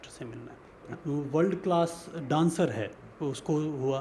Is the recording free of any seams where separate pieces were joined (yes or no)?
no